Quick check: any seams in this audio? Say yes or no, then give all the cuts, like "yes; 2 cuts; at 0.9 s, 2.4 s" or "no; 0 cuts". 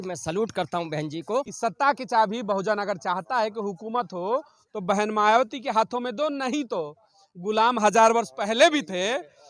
yes; 1 cut; at 1.5 s